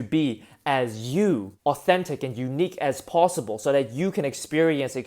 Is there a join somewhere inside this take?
yes; 1 cut; at 1.5 s

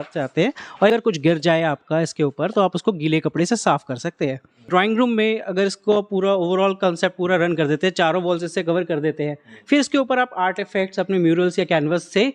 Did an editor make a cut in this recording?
yes; 2 cuts; at 0.9 s, 4.7 s

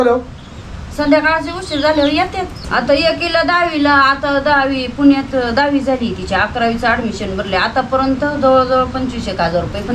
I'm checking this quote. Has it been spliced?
no; 0 cuts

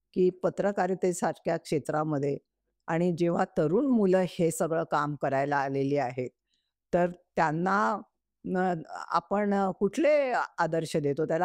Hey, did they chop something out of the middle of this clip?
no; 0 cuts

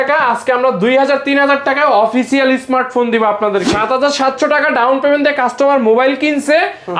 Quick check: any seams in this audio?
yes; 1 cut; at 3.7 s

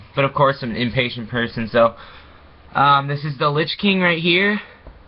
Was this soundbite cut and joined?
yes; 1 cut; at 1.2 s

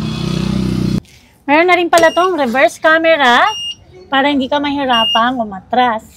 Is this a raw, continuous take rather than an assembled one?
no; 1 cut; at 1.1 s

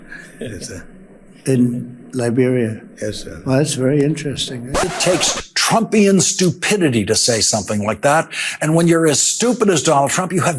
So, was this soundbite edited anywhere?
yes; 1 cut; at 5.0 s

